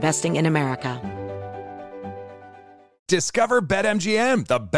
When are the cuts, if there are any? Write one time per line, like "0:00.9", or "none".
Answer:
0:01.0